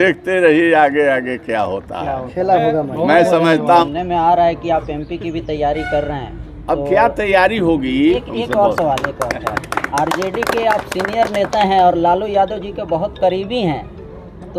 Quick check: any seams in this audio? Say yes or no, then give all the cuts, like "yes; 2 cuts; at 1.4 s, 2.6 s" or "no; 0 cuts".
yes; 2 cuts; at 3.8 s, 8.3 s